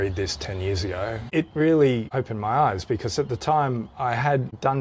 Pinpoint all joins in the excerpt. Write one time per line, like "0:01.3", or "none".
0:01.3